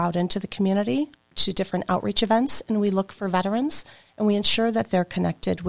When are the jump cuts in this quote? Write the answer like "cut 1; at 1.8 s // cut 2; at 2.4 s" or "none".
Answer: cut 1; at 1.3 s